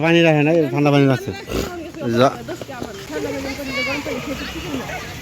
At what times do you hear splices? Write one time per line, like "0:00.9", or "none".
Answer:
0:03.1